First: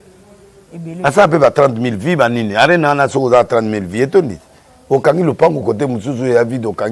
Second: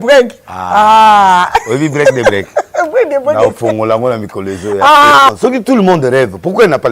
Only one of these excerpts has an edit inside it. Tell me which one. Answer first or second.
second